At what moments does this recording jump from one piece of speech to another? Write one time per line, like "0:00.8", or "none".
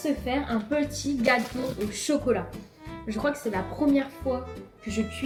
none

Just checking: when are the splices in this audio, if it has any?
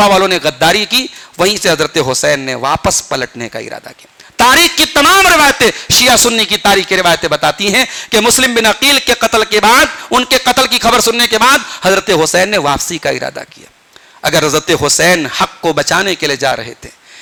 none

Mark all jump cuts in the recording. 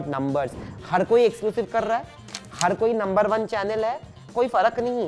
0:04.2

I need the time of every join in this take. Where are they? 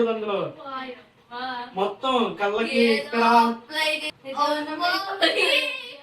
0:04.2

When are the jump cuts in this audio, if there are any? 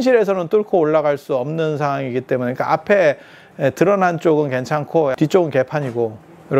0:05.1

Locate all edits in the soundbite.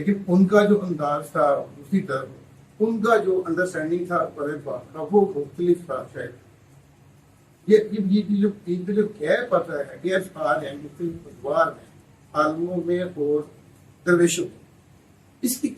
none

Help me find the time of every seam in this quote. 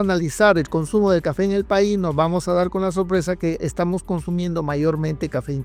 none

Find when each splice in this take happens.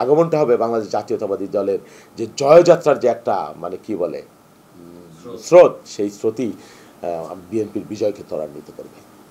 none

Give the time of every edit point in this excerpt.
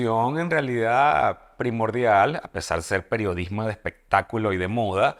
none

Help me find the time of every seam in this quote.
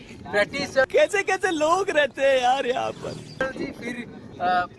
0:00.9
0:03.4

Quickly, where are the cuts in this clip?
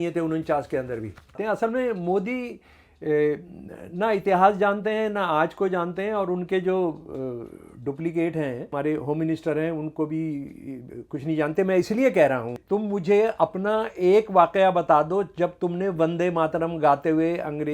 0:01.4
0:08.7
0:12.6

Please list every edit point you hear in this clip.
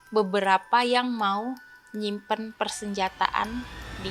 none

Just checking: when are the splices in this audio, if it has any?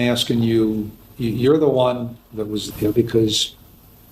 0:02.6

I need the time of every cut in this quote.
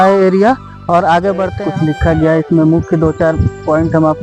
0:01.5

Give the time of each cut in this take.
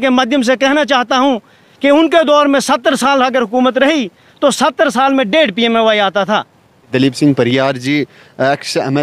0:06.9

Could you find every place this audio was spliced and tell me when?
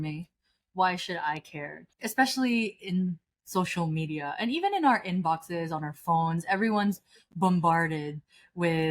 0:01.8

